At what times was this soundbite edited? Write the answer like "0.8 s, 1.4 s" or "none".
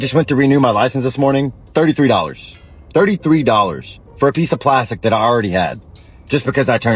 none